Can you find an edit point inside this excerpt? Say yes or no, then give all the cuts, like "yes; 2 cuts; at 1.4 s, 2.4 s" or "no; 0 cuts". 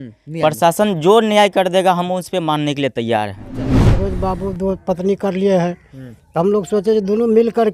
yes; 1 cut; at 3.8 s